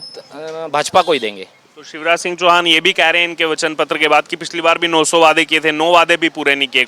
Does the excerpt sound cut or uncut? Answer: uncut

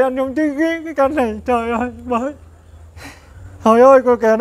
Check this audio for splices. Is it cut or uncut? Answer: uncut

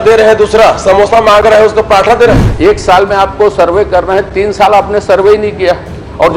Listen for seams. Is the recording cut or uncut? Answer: cut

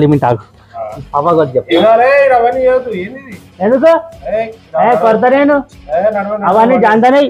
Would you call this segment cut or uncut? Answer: uncut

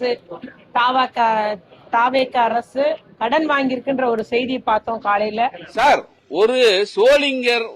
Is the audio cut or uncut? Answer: cut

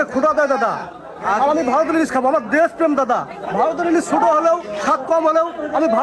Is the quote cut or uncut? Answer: uncut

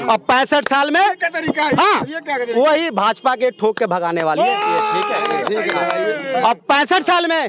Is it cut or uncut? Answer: uncut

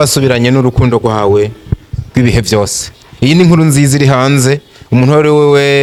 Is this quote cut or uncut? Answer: uncut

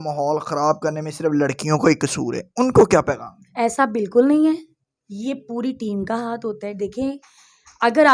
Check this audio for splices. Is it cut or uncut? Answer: uncut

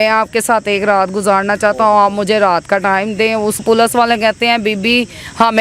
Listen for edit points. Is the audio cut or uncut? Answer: cut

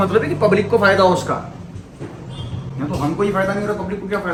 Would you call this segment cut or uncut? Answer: uncut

